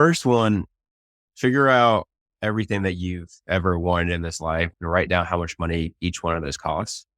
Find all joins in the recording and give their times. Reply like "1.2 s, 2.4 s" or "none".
4.7 s